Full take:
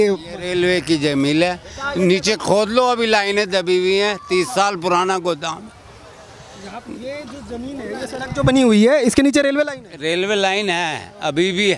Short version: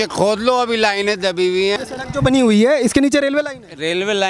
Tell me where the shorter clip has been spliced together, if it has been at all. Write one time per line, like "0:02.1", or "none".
0:01.8